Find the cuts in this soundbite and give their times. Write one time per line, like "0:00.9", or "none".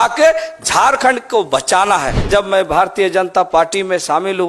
0:02.1